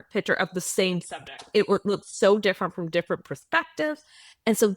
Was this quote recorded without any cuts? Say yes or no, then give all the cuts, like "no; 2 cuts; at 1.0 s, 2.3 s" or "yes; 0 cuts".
no; 1 cut; at 3.3 s